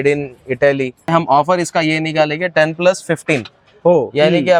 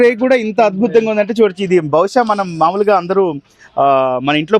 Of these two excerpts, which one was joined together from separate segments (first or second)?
first